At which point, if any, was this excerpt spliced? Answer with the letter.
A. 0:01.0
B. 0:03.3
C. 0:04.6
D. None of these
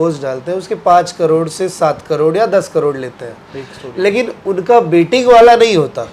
D